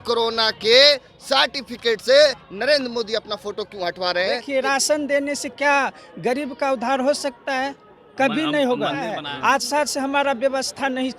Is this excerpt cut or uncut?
cut